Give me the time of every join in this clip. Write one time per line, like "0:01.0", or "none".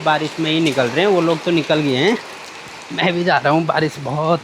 none